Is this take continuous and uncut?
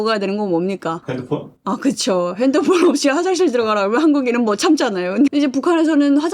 no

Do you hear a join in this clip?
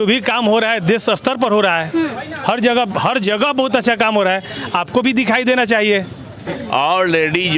yes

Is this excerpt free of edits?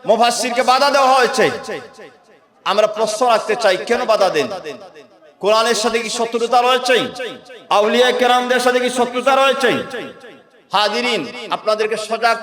yes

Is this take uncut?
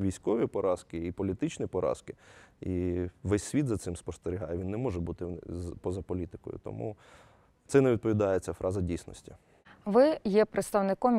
yes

